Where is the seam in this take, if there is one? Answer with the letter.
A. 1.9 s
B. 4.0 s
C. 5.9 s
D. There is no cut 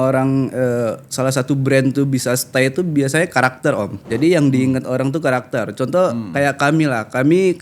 B